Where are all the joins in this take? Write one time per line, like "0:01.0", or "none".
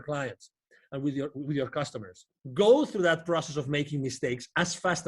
0:02.4